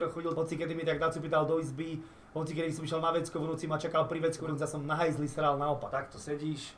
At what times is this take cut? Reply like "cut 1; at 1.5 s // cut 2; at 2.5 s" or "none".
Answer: cut 1; at 4.4 s // cut 2; at 5.9 s